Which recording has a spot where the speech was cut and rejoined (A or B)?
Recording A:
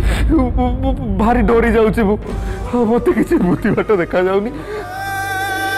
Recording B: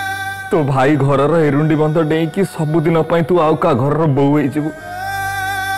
A